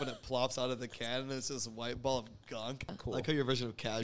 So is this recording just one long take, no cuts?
no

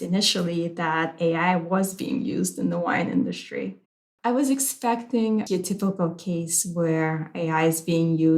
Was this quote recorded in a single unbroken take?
no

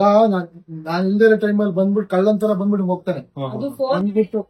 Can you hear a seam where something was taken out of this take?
no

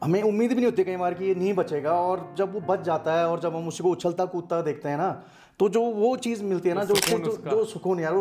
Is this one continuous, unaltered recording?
yes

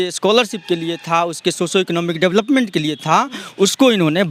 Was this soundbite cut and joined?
no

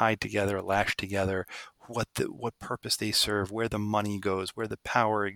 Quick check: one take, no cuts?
yes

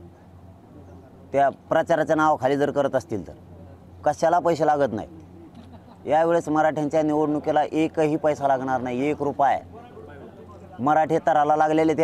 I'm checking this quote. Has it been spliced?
no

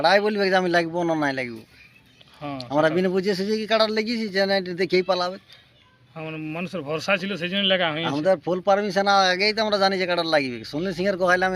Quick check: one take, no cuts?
yes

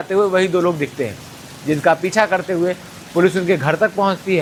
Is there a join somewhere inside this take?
no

